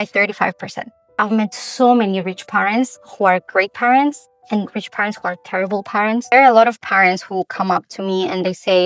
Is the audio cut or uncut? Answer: cut